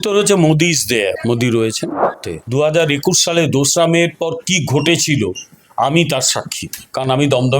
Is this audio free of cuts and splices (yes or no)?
no